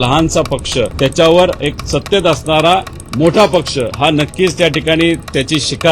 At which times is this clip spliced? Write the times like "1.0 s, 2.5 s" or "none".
0.9 s, 1.8 s, 3.9 s